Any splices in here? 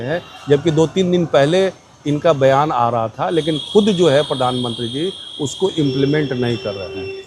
no; 0 cuts

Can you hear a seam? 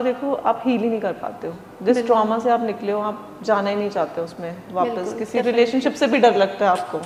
no; 0 cuts

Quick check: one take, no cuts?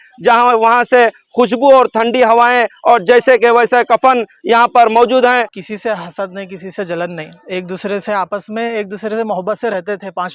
no; 1 cut; at 5.5 s

